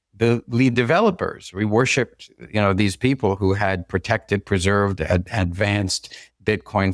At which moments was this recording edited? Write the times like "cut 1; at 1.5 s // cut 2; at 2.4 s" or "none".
none